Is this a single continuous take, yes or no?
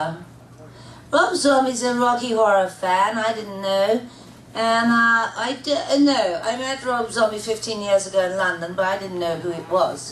yes